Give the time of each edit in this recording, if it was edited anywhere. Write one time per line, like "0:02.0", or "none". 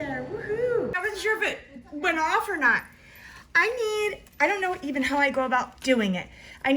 0:00.9